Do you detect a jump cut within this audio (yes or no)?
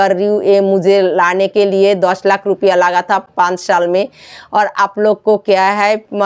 no